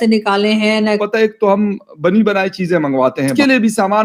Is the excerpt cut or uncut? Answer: cut